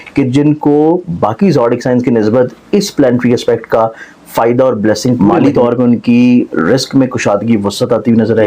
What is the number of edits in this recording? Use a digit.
1